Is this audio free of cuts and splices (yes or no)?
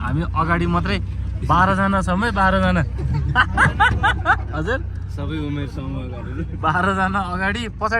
yes